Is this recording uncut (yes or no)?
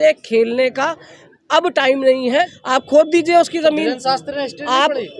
no